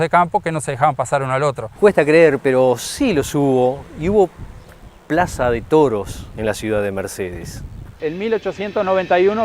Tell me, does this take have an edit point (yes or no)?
yes